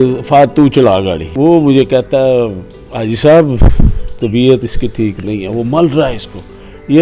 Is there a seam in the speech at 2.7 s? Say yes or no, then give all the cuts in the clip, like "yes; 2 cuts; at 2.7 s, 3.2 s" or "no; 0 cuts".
no; 1 cut; at 1.2 s